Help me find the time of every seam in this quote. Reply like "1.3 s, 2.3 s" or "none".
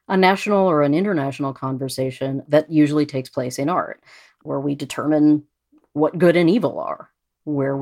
2.4 s, 4.4 s